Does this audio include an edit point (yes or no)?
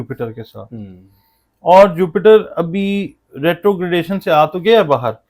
no